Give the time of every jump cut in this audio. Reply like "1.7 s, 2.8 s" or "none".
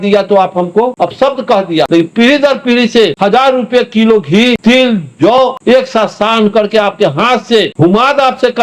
0.9 s, 1.9 s, 3.1 s, 4.6 s, 5.4 s, 7.7 s